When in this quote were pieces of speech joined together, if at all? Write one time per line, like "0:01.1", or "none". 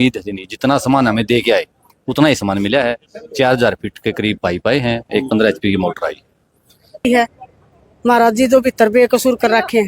0:07.0

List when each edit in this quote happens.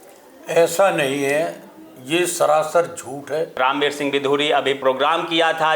0:03.5
0:04.8

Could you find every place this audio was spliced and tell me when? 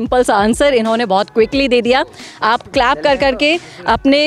none

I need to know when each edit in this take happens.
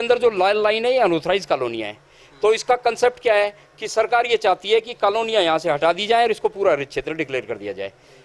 none

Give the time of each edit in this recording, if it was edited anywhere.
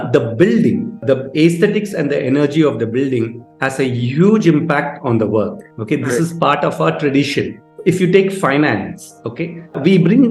none

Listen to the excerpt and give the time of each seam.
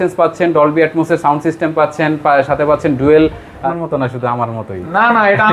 0:03.6

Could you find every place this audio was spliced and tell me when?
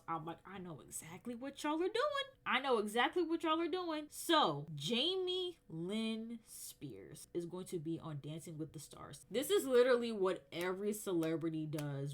0:09.1

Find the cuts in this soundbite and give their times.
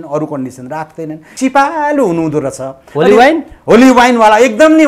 0:01.2

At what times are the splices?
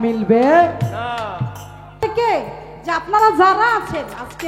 0:02.0

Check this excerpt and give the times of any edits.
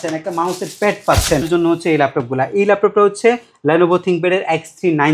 0:01.5

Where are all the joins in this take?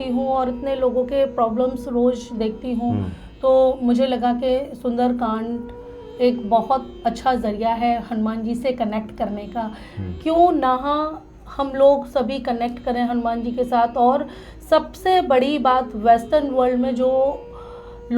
none

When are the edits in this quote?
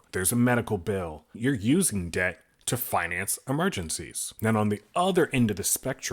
0:01.2

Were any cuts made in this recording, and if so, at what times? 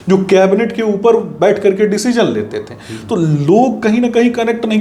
none

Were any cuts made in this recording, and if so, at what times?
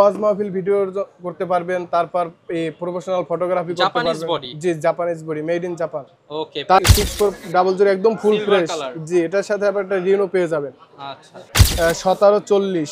0:06.8
0:11.6

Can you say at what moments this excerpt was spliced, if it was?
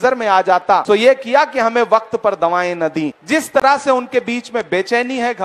0:00.8
0:03.2

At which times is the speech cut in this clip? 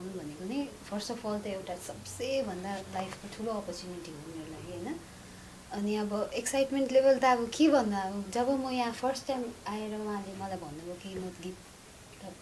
none

